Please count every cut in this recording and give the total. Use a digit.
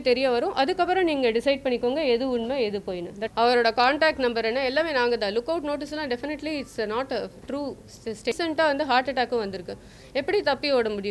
2